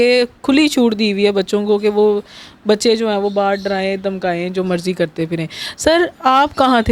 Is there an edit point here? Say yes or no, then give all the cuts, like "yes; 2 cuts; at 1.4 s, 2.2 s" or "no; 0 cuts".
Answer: no; 0 cuts